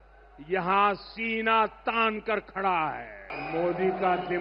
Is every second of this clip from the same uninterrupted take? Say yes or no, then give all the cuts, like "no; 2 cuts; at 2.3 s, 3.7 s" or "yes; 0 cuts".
no; 1 cut; at 3.3 s